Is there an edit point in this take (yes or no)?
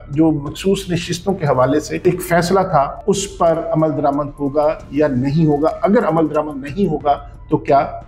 yes